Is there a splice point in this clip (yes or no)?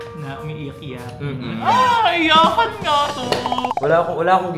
no